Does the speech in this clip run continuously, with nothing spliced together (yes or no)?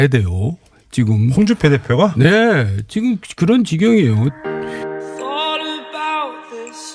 no